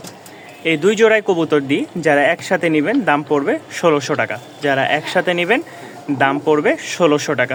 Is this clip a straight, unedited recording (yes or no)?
yes